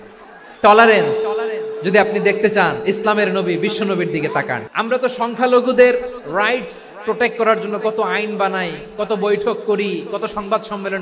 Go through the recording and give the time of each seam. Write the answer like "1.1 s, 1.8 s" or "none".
4.6 s